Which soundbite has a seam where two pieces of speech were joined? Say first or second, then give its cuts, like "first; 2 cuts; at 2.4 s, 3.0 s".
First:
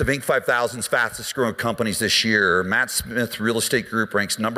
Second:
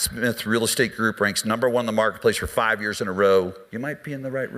second; 1 cut; at 3.6 s